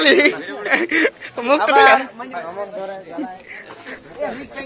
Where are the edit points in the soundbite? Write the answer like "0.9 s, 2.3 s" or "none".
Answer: none